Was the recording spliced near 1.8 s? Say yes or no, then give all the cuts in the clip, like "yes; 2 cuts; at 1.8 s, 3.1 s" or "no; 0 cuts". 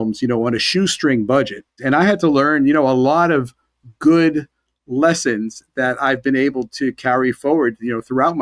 yes; 1 cut; at 1.8 s